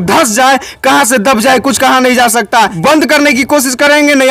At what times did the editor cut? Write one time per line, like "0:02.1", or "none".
0:02.7